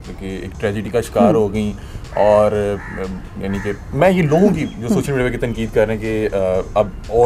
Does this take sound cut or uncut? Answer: uncut